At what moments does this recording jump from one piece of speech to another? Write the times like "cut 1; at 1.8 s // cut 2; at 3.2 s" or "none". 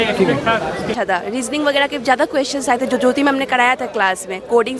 cut 1; at 0.9 s